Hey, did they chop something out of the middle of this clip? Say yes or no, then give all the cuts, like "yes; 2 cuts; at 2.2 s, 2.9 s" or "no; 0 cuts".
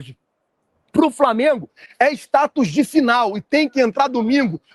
no; 0 cuts